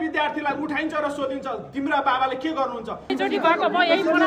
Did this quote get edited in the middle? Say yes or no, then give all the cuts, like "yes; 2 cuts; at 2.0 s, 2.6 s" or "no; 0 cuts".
yes; 1 cut; at 3.1 s